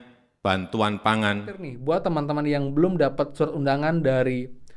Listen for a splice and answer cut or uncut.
cut